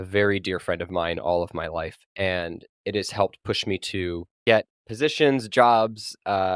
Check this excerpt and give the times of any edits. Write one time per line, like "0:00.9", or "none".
0:02.0
0:04.3